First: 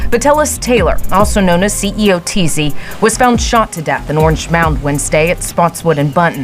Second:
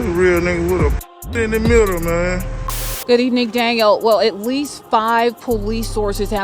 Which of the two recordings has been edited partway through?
second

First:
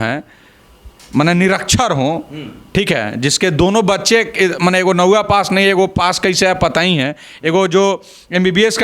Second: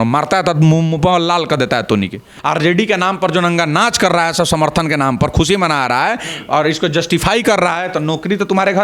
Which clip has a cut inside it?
second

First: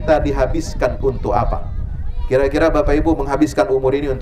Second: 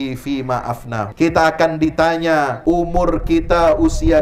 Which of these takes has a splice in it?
second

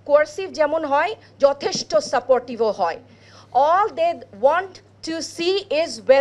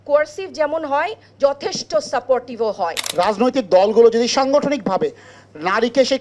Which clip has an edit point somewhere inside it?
second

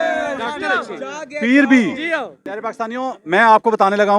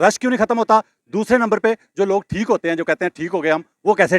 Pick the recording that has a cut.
first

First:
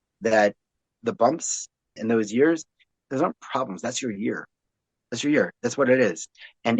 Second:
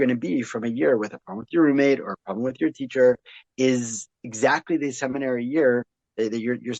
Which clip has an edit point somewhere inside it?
first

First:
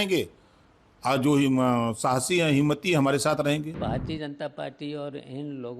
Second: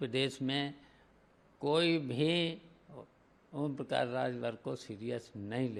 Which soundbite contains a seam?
first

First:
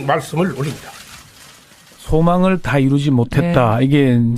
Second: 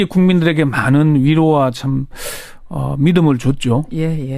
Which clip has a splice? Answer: second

